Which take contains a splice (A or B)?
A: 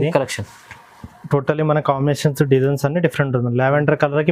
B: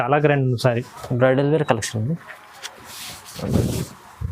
B